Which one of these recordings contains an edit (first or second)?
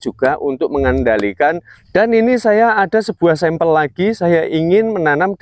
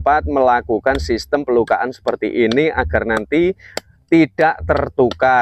first